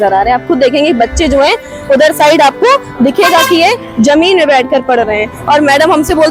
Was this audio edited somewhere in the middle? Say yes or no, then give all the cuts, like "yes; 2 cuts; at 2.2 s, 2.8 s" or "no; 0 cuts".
no; 0 cuts